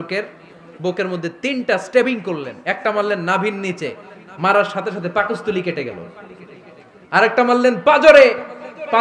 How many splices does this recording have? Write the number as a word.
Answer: zero